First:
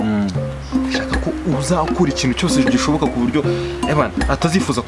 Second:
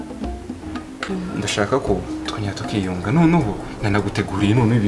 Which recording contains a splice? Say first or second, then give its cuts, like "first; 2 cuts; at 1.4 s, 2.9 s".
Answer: second; 1 cut; at 1.1 s